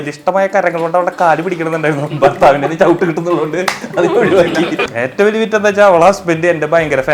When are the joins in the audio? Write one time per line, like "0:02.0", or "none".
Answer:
0:04.8